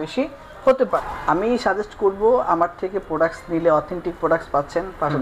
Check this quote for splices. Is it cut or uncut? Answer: cut